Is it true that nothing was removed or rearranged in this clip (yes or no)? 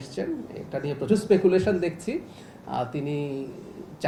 yes